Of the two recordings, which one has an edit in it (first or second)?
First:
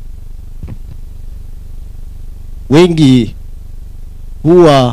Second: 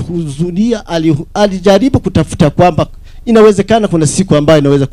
first